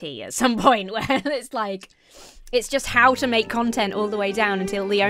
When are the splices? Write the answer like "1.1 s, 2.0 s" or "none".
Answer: none